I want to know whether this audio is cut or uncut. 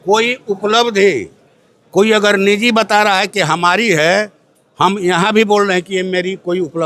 uncut